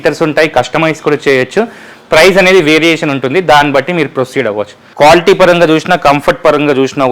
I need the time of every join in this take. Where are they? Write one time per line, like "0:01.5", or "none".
0:04.8